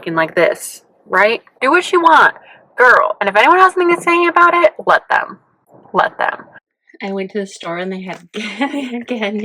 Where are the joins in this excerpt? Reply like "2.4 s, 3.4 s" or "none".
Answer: 1.5 s, 6.5 s